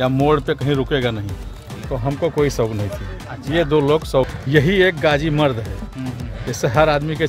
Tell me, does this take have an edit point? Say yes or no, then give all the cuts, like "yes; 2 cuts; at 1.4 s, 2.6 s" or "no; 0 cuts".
yes; 2 cuts; at 1.5 s, 4.4 s